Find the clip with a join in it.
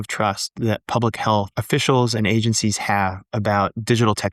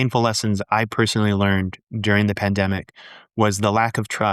first; 1 cut; at 1.6 s

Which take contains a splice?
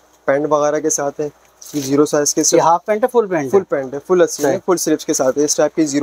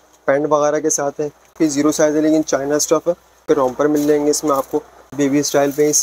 second; 3 cuts; at 1.5 s, 3.4 s, 5.0 s

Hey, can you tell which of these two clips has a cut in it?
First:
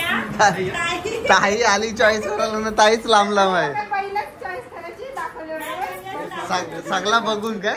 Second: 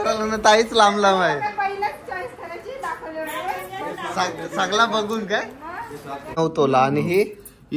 second; 1 cut; at 6.4 s

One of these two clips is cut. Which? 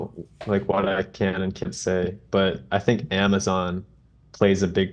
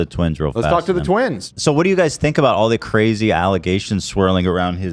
second; 1 cut; at 1.4 s

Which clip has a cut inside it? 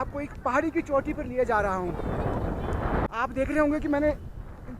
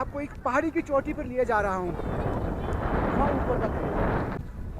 first; 1 cut; at 3.0 s

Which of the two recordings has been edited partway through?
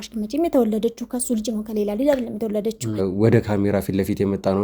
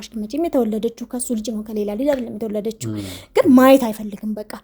first; 1 cut; at 3.0 s

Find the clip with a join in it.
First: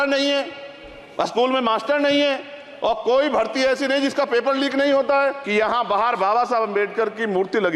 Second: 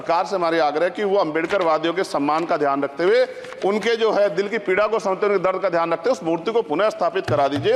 first; 1 cut; at 5.4 s

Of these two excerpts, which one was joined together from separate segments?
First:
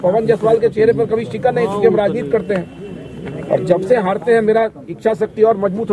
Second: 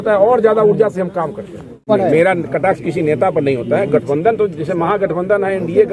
second; 1 cut; at 1.8 s

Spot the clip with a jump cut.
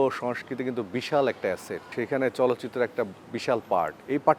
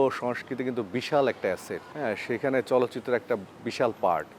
first; 1 cut; at 1.9 s

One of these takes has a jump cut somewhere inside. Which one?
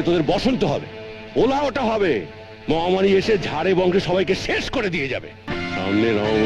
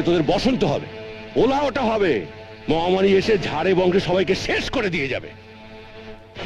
first; 1 cut; at 5.5 s

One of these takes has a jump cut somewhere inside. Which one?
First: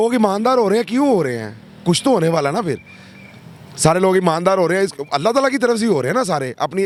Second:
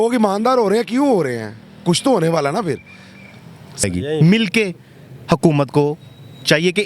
second; 1 cut; at 3.8 s

